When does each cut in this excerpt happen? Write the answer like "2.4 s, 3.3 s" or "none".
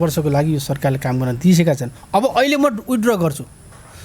none